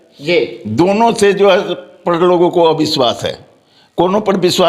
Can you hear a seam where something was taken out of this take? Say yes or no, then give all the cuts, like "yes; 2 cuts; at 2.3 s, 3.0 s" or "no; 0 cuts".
no; 0 cuts